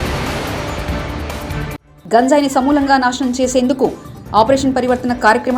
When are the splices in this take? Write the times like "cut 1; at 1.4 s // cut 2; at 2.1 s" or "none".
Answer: cut 1; at 1.8 s